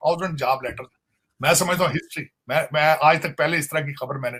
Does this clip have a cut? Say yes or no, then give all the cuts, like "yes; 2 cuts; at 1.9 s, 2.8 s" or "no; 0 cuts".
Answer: no; 0 cuts